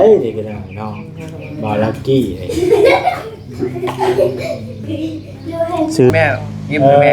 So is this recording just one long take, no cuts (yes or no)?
no